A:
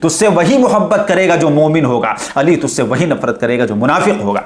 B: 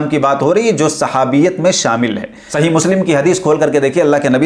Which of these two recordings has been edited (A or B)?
B